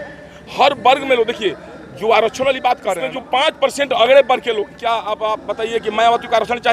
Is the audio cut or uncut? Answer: cut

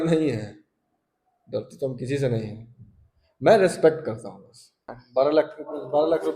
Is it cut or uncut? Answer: cut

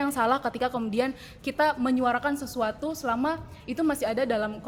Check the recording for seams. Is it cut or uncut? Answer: uncut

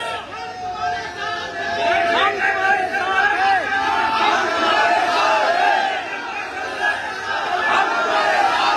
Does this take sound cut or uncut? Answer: uncut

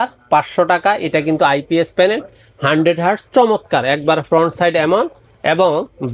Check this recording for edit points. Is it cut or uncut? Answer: uncut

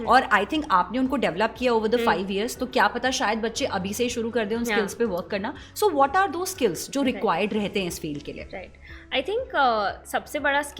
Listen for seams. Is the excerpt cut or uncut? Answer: uncut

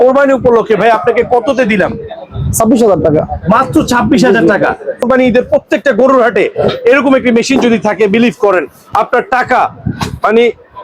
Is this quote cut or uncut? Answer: cut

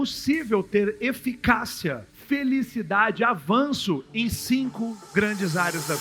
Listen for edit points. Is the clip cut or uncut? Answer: uncut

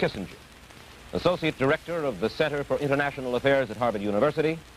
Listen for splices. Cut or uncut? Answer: uncut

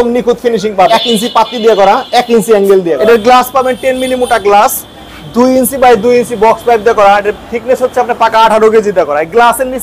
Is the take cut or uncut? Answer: cut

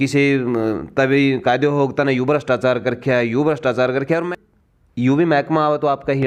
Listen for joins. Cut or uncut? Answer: cut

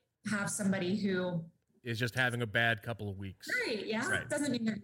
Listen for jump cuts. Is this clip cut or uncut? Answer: uncut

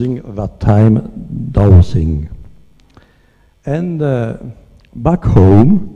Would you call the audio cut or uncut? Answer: uncut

